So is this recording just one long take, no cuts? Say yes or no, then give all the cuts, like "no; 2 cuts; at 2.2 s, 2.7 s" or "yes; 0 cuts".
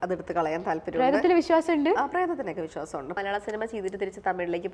no; 1 cut; at 3.2 s